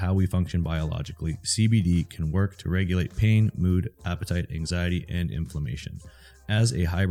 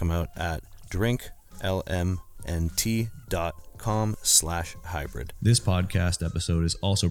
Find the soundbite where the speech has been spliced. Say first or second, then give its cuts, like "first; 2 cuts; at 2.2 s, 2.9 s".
second; 1 cut; at 5.2 s